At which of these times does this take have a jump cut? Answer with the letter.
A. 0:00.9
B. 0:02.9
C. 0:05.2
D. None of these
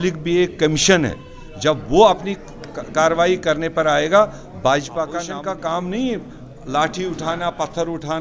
C